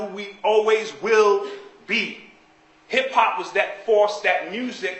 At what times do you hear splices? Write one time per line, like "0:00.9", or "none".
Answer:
0:03.8